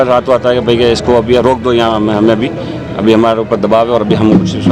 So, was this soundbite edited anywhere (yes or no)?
no